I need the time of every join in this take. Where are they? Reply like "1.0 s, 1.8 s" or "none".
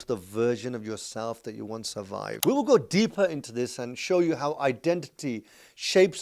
2.3 s